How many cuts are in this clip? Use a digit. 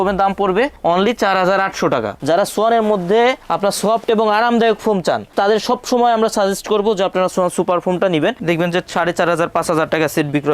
2